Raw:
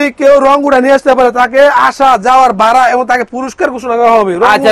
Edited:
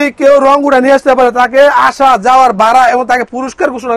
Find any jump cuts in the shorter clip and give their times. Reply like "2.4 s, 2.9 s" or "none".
none